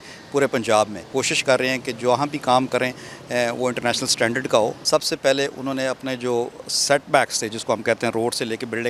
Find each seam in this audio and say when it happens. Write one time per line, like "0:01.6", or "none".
0:01.0
0:04.8